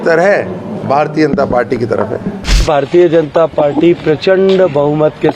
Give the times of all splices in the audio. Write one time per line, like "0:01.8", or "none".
0:02.6

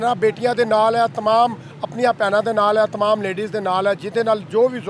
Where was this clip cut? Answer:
none

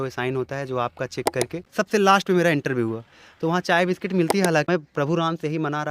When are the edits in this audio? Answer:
0:01.6
0:04.7

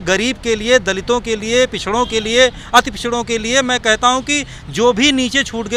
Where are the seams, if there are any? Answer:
none

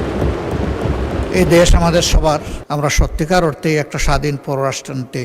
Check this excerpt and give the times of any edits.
0:02.5

